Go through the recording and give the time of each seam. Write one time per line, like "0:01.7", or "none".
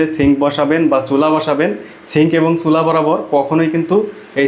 none